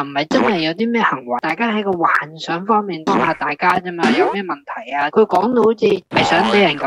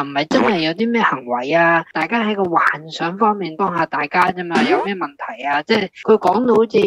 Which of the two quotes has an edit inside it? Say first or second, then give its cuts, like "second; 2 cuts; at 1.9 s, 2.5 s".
first; 2 cuts; at 1.4 s, 5.1 s